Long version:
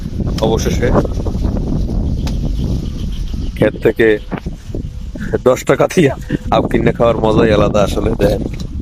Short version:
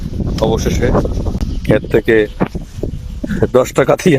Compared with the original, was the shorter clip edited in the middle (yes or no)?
yes